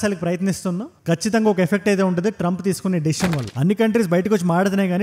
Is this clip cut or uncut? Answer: cut